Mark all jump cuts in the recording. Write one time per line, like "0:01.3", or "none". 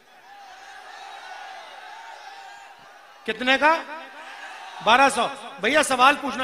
none